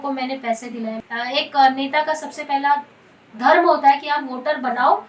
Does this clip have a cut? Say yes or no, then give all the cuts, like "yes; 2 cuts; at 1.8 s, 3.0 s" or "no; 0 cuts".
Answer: yes; 1 cut; at 1.0 s